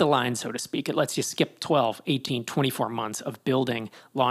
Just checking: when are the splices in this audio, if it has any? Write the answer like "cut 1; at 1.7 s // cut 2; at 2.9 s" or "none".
none